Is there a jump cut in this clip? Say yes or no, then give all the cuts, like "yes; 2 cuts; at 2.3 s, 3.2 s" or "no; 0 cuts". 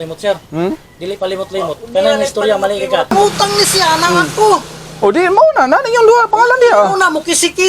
yes; 1 cut; at 3.1 s